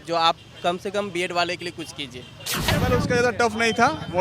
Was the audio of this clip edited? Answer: yes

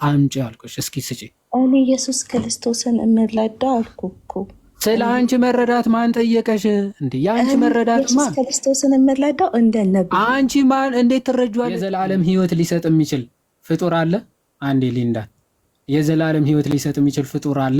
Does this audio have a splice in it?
yes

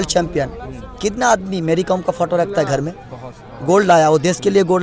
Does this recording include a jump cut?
no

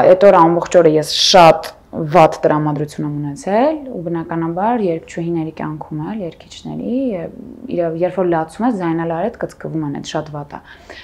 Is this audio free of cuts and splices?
yes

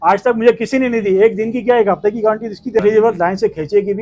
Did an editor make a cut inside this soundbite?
yes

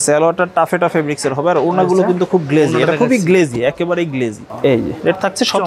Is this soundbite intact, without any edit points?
yes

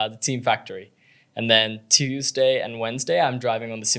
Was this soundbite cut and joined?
no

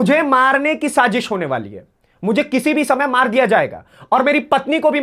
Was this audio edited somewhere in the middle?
no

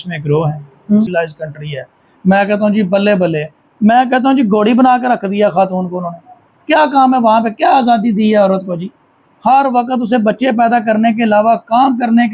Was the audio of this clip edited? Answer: yes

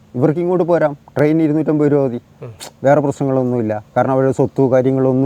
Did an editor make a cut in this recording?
no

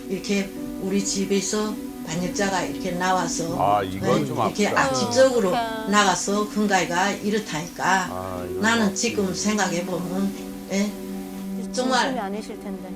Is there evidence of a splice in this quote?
no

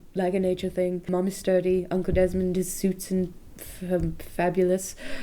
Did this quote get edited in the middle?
yes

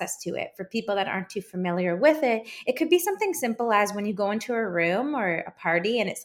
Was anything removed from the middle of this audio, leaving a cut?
no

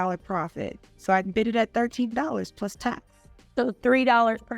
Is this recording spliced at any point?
no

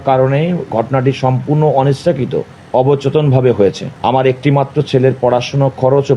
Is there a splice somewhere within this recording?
yes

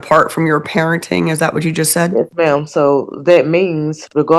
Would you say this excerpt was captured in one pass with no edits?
yes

